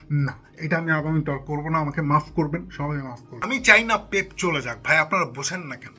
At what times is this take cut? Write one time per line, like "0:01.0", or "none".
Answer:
0:03.5